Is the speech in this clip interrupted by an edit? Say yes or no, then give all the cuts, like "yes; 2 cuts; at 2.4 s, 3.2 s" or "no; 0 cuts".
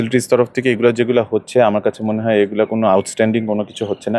no; 0 cuts